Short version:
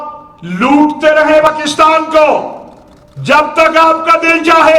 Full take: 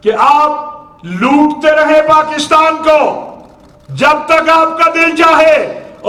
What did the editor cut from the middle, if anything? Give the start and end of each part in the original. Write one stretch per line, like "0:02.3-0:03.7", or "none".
0:02.1-0:02.2